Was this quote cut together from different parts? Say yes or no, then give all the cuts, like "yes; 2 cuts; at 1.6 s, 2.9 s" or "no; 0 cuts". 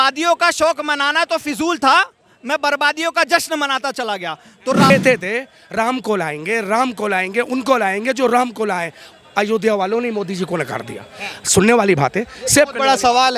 yes; 1 cut; at 4.9 s